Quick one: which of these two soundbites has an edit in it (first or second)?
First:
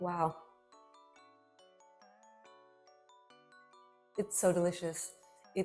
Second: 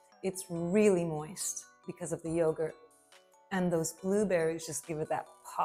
first